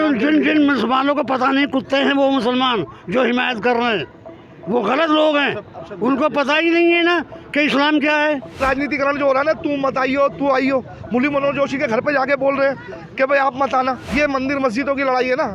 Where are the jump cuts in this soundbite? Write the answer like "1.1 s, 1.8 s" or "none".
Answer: 8.6 s, 14.0 s

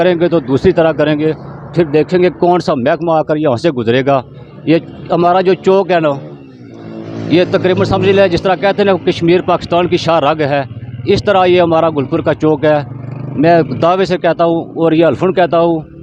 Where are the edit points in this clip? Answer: none

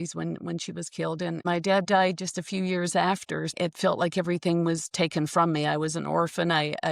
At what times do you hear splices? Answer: 1.4 s, 3.6 s

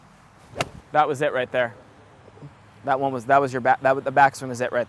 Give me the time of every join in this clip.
none

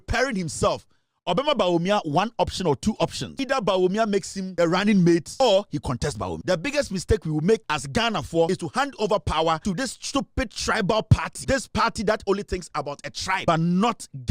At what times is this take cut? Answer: 3.2 s, 4.4 s, 5.3 s, 6.4 s, 8.2 s, 9.6 s, 11.3 s, 13.4 s

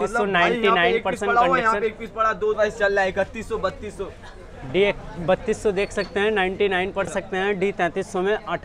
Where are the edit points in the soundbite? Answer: 2.6 s, 7.1 s

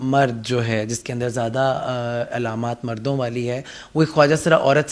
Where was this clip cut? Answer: none

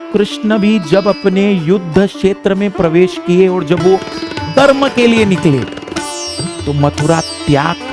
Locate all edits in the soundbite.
none

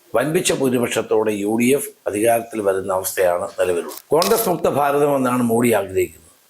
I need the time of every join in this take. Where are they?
3.9 s

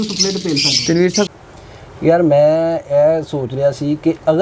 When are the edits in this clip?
1.3 s

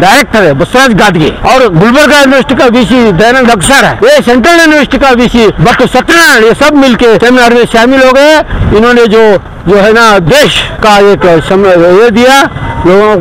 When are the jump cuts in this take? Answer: 1.4 s, 3.9 s, 5.6 s, 7.2 s, 10.7 s

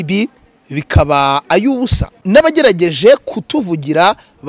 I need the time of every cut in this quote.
2.2 s

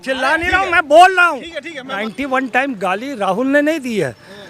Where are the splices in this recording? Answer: 2.0 s

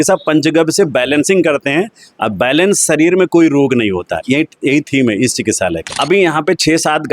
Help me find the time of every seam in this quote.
5.9 s

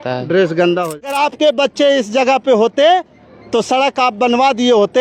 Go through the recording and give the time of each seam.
1.2 s

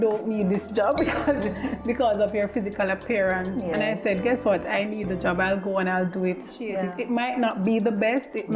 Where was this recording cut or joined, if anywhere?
6.9 s

